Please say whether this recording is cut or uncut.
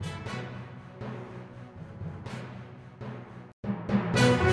uncut